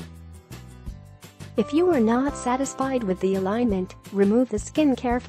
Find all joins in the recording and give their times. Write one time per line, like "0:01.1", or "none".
0:01.5